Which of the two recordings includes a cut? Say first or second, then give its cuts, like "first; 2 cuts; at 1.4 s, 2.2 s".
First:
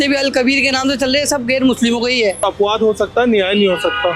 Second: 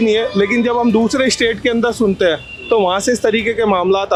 first; 1 cut; at 2.4 s